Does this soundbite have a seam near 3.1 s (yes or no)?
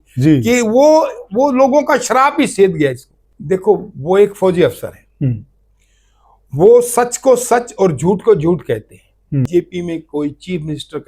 yes